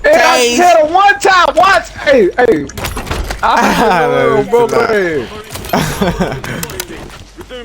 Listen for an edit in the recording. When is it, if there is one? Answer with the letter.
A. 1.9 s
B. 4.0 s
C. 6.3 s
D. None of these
A